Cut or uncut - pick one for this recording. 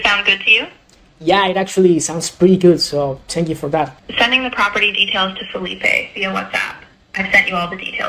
cut